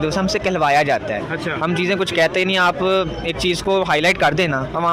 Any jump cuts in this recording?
no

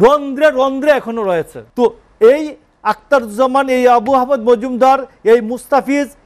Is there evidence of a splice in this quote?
yes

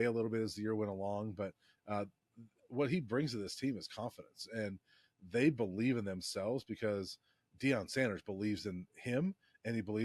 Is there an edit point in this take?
no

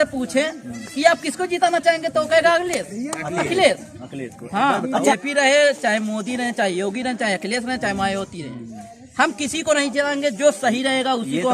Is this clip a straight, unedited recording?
no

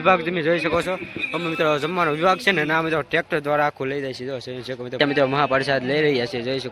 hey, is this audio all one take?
no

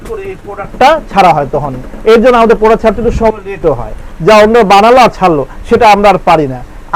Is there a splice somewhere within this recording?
no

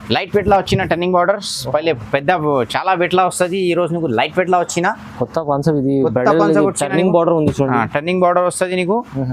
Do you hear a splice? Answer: no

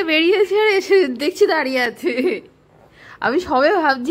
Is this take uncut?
yes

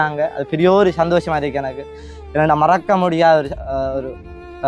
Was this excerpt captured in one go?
yes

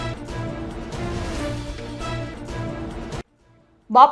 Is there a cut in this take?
yes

